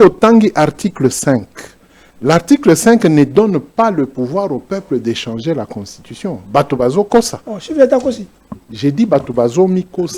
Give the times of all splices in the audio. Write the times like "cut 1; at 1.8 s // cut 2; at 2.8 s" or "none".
none